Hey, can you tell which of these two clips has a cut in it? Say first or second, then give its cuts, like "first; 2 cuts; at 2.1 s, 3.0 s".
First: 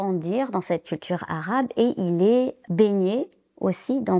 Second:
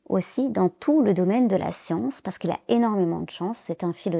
first; 1 cut; at 2.6 s